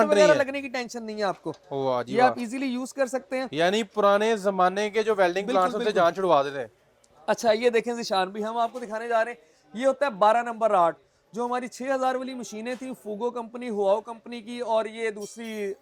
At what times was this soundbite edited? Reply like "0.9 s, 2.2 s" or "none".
none